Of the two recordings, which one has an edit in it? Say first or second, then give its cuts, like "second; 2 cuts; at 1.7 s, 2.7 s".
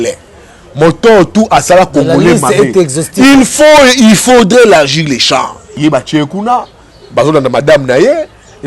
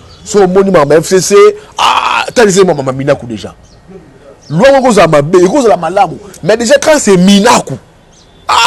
first; 1 cut; at 5.6 s